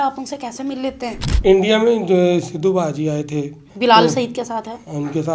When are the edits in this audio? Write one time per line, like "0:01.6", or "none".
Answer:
0:01.3
0:03.6